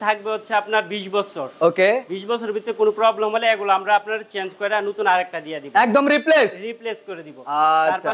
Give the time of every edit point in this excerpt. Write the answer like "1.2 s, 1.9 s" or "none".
none